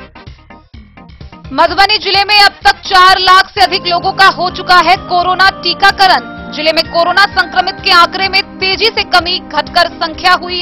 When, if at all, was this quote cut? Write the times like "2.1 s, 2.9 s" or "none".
1.1 s